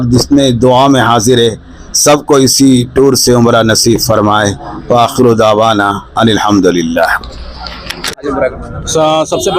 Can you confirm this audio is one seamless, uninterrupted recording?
yes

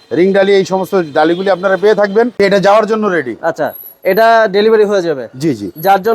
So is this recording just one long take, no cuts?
no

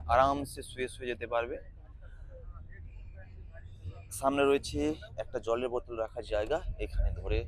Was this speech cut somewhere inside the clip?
no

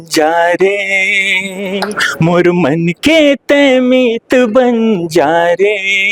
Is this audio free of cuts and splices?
yes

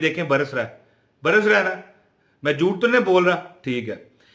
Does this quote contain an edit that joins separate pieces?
no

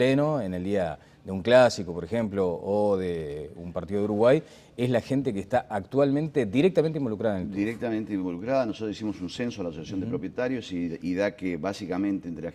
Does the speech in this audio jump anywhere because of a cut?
no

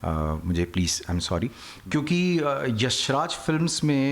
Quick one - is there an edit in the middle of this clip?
yes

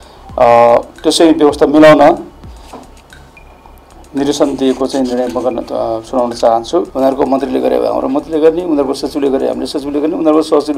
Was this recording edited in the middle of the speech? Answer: yes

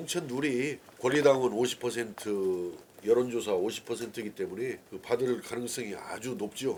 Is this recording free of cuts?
yes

